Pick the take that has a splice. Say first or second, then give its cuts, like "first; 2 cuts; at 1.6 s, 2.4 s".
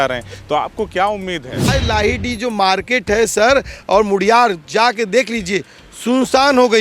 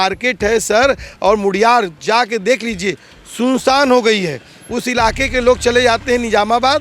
first; 1 cut; at 1.7 s